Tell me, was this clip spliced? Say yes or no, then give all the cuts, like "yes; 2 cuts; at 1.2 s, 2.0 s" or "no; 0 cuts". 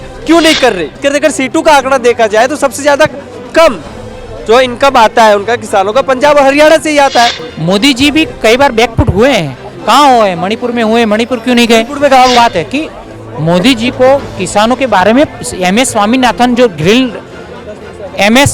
yes; 3 cuts; at 1.0 s, 7.5 s, 12.3 s